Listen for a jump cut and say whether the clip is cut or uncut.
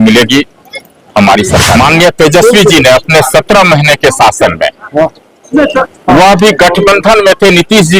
cut